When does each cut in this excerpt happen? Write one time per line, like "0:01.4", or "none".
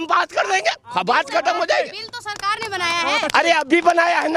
none